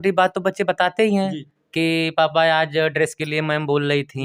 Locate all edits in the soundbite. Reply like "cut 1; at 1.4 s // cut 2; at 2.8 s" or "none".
none